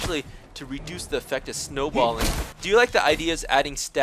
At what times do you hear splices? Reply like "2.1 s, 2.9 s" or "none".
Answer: 2.5 s